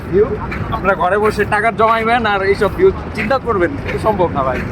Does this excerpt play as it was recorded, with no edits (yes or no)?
yes